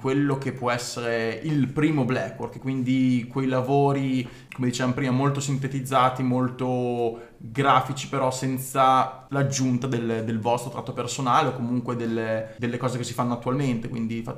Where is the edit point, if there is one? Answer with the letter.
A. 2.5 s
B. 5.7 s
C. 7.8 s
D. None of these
D